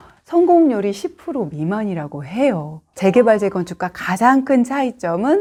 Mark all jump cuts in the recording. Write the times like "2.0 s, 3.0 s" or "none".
none